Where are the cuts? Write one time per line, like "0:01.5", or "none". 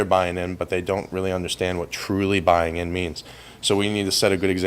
0:03.3